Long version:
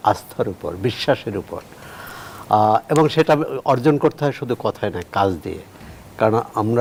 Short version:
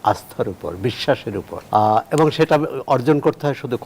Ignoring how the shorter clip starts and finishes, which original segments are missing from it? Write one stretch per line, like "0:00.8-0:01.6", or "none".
0:01.6-0:02.3